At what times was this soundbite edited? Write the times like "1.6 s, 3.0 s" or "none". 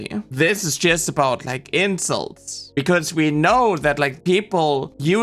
2.6 s

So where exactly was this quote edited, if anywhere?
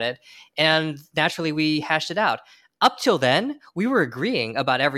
none

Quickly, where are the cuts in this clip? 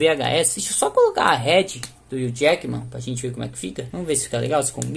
3.9 s

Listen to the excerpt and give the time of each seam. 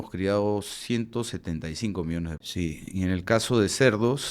2.4 s

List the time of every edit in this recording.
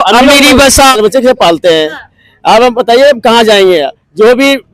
1.0 s

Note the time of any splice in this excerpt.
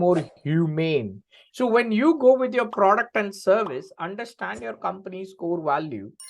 1.3 s

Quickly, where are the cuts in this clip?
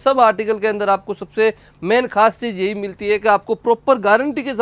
none

